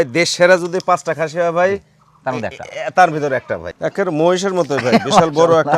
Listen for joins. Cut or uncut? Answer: cut